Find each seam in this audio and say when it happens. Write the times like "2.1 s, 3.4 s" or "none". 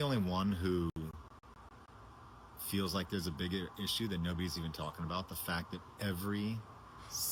none

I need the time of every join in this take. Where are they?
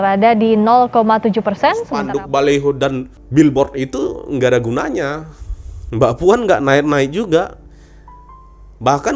1.9 s, 3.2 s

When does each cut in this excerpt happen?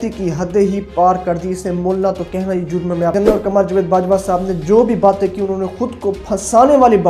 3.1 s

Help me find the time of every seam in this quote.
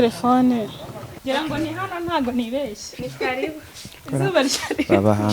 1.1 s

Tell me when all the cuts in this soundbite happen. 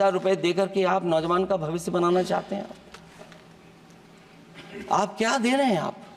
none

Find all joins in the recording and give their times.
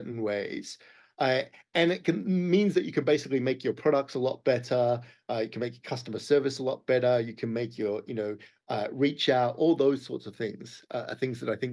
none

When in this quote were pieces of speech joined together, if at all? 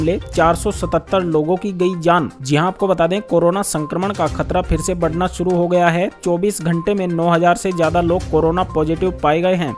none

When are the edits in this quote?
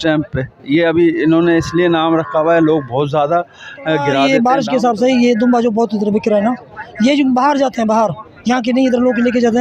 4.2 s

